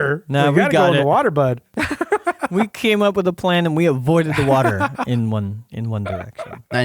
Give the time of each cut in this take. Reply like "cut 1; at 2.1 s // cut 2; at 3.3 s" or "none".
cut 1; at 1.7 s